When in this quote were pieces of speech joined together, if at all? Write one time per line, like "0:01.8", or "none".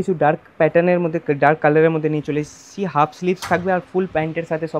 none